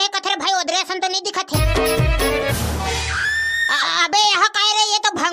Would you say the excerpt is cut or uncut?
uncut